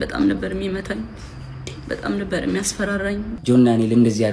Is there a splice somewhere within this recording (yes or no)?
yes